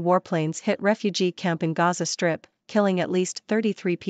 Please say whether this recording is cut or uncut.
uncut